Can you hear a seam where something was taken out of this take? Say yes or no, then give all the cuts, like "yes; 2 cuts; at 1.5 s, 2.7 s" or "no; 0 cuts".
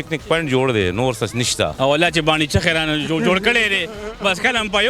yes; 1 cut; at 1.7 s